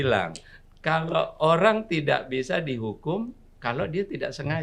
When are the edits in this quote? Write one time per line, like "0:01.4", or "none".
none